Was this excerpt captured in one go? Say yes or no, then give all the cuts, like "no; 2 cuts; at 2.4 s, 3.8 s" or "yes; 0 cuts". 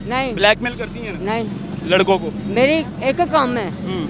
yes; 0 cuts